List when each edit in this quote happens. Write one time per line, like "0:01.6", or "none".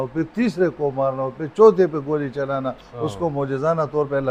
none